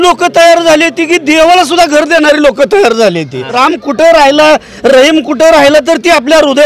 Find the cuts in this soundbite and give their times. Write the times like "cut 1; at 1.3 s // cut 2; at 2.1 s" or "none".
cut 1; at 3.5 s